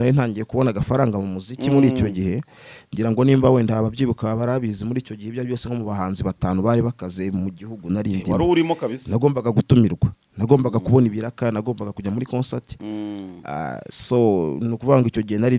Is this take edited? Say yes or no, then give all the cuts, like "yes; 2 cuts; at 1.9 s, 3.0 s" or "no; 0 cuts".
no; 0 cuts